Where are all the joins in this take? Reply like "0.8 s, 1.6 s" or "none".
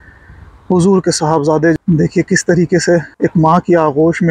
1.7 s, 3.1 s